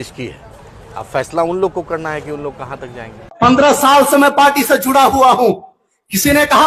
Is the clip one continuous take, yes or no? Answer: no